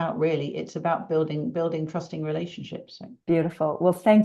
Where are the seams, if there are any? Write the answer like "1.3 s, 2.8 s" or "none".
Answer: none